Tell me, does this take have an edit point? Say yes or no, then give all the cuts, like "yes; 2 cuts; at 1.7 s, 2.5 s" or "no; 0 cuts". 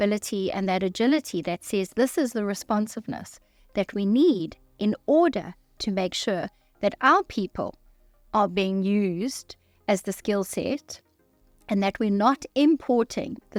no; 0 cuts